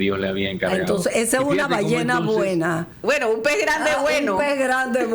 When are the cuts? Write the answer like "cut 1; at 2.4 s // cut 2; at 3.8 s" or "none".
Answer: cut 1; at 2.9 s